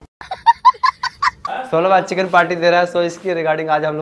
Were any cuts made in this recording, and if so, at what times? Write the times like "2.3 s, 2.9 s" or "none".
1.5 s